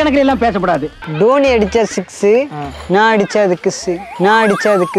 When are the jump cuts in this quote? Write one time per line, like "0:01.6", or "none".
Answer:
0:01.0